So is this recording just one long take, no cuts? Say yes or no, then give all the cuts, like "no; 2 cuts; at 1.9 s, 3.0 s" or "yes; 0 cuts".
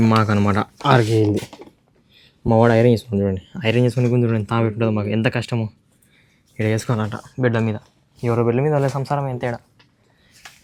yes; 0 cuts